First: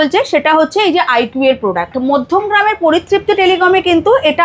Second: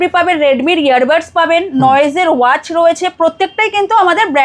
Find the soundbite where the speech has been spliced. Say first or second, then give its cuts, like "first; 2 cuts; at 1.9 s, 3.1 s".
first; 1 cut; at 1.9 s